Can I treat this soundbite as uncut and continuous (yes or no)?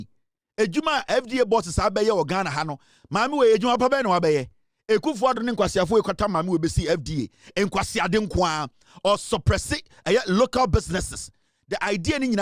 yes